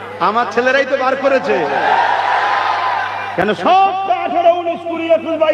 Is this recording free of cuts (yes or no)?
yes